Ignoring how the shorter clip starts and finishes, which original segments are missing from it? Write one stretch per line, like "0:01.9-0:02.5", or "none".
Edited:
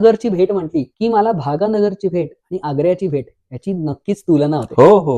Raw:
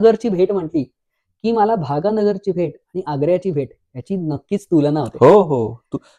0:00.9-0:01.3